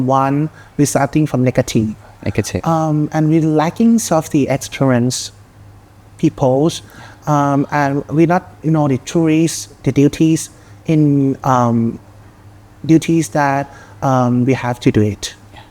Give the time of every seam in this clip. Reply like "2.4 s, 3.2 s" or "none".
none